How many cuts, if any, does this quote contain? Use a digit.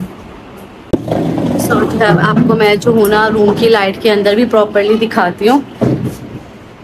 1